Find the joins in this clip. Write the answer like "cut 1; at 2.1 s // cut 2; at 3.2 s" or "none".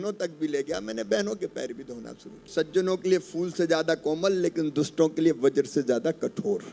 cut 1; at 2.5 s